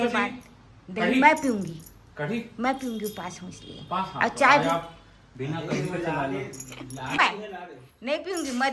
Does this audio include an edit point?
no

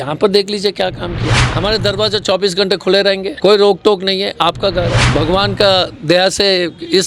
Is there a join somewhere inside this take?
yes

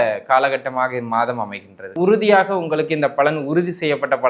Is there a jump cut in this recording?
yes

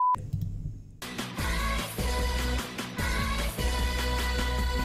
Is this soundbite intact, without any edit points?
yes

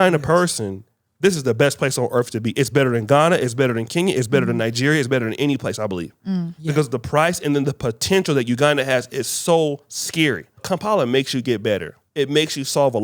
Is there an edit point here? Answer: yes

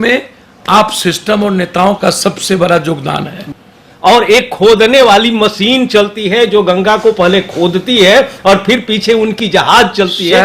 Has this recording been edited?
yes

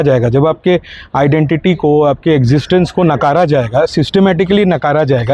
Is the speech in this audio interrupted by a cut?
no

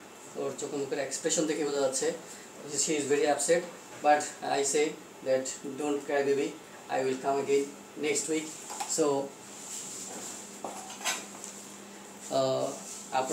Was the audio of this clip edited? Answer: no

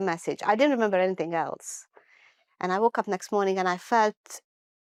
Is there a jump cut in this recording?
no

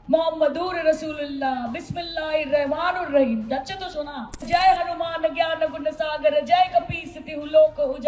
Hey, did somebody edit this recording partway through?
yes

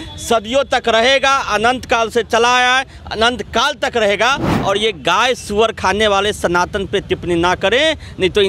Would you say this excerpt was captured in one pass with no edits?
yes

